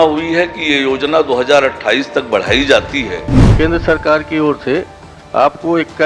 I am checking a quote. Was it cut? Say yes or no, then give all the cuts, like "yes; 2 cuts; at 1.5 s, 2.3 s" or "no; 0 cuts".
yes; 1 cut; at 3.4 s